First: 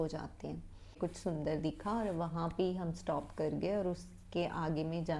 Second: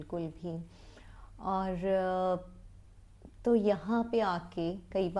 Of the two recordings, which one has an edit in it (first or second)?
first